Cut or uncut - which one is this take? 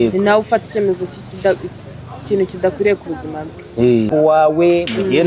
cut